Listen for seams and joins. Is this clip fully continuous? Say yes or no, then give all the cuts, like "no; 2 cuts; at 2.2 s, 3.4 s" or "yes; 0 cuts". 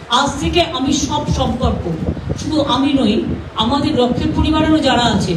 yes; 0 cuts